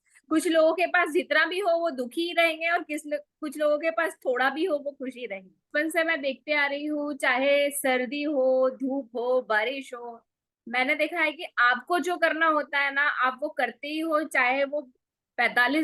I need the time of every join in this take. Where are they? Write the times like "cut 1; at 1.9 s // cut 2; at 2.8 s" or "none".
cut 1; at 5.7 s